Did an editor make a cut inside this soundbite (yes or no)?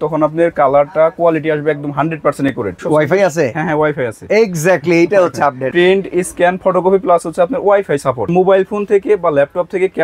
yes